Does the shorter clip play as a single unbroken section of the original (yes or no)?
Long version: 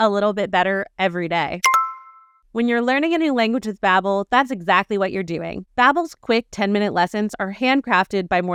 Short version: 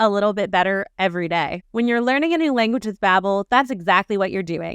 no